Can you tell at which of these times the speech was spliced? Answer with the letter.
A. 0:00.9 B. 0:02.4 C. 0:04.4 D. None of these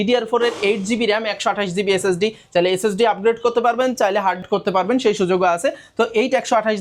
D